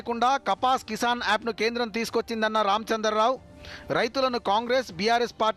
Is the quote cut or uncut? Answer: uncut